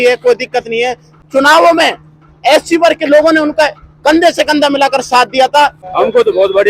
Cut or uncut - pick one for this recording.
cut